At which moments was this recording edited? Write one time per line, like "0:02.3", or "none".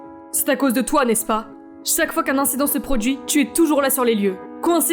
none